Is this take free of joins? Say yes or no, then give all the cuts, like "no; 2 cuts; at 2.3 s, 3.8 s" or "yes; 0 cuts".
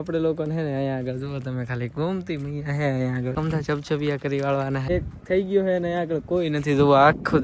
no; 2 cuts; at 3.3 s, 4.9 s